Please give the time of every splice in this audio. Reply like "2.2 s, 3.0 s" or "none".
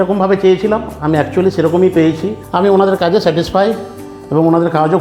2.4 s